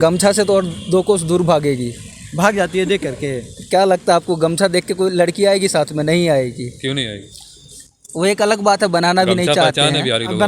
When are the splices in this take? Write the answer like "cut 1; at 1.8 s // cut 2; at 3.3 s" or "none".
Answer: none